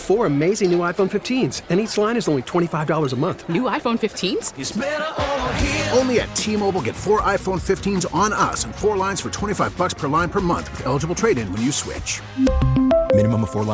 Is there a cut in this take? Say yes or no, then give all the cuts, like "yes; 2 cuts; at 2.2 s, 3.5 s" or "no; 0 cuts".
no; 0 cuts